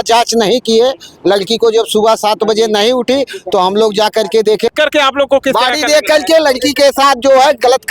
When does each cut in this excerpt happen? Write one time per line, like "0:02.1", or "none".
0:04.7